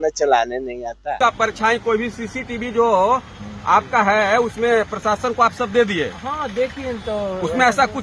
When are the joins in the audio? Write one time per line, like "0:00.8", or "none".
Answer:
0:01.2